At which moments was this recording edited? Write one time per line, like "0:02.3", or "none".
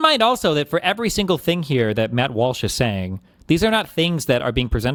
none